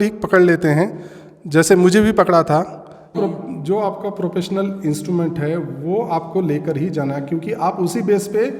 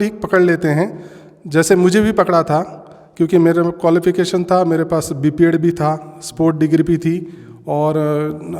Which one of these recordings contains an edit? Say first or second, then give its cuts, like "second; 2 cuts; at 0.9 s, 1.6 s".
first; 1 cut; at 3.1 s